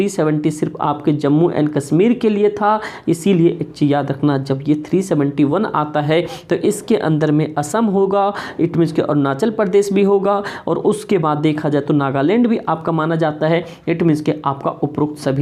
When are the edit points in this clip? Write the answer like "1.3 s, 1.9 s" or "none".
none